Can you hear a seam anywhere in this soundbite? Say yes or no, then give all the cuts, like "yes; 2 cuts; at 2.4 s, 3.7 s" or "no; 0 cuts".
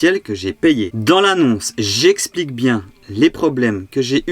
yes; 1 cut; at 0.9 s